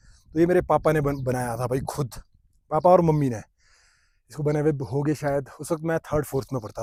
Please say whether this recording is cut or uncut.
uncut